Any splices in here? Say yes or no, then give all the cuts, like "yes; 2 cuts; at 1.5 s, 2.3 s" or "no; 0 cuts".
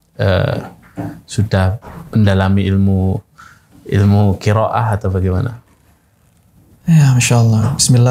no; 0 cuts